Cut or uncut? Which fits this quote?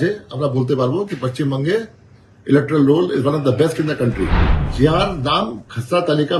uncut